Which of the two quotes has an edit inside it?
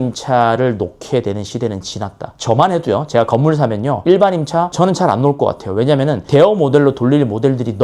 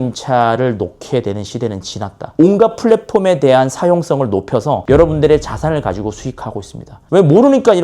second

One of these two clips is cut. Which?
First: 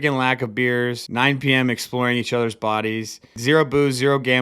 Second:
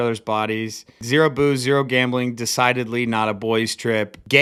first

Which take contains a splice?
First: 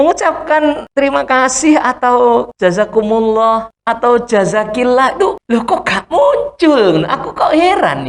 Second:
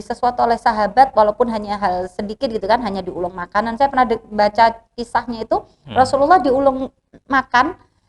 first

